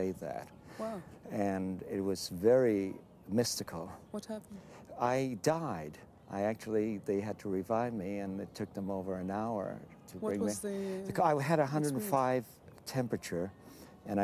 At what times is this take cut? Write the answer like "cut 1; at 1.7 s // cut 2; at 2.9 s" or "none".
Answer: cut 1; at 7.3 s